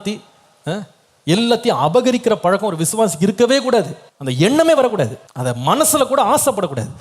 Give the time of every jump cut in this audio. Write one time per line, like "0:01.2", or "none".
0:05.3